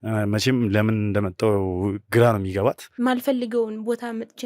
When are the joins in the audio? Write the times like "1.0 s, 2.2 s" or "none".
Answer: 2.9 s